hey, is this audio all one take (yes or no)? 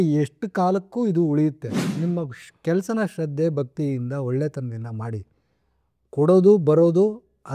no